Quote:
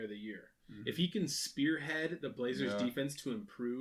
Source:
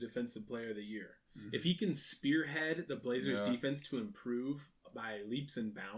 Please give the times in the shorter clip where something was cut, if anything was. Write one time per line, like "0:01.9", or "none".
none